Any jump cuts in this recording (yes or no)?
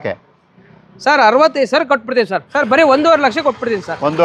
yes